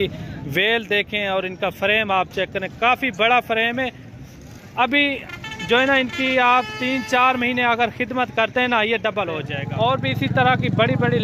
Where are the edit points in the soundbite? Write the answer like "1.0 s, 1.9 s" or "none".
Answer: 9.6 s